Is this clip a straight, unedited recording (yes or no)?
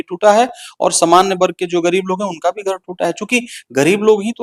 yes